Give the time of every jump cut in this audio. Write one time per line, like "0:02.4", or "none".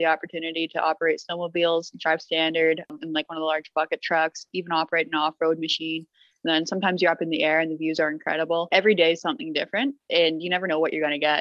0:02.9
0:08.7